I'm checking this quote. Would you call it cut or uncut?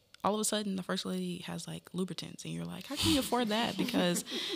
uncut